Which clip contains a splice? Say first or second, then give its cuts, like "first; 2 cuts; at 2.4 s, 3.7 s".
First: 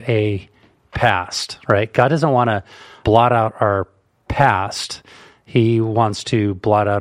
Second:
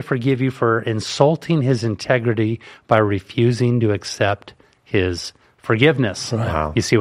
first; 1 cut; at 3.0 s